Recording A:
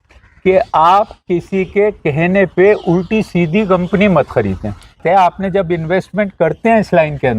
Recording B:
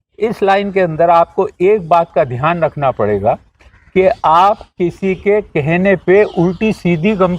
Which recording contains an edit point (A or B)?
A